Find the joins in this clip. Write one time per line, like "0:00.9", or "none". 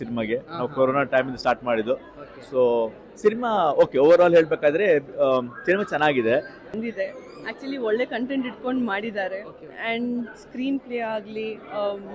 0:06.8